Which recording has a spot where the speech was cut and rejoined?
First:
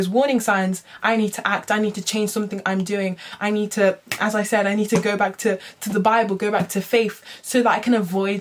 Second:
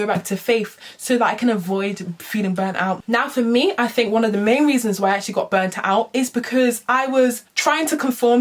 second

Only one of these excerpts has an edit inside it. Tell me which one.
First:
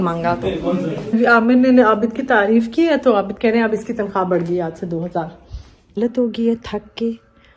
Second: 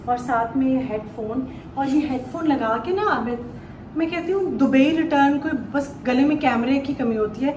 first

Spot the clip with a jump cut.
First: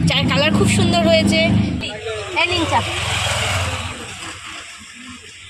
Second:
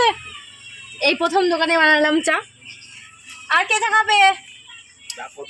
first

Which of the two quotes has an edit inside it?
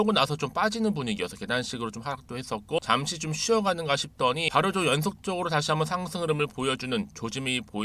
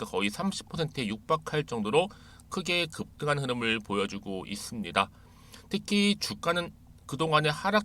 first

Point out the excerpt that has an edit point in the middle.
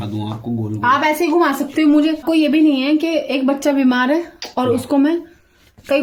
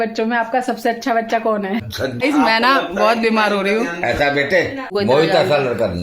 second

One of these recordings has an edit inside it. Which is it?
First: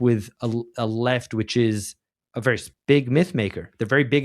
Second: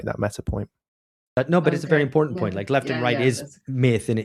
first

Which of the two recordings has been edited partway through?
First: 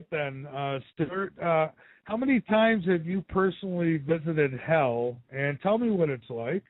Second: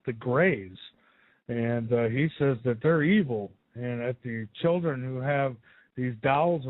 first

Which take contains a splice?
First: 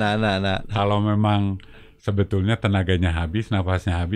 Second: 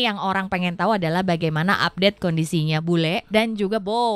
second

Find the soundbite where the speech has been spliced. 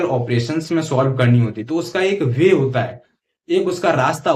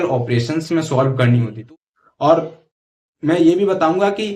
second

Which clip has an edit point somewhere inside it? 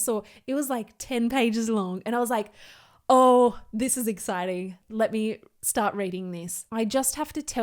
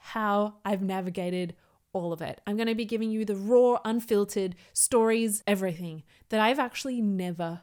first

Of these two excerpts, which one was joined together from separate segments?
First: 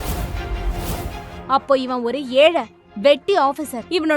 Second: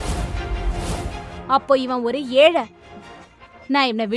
second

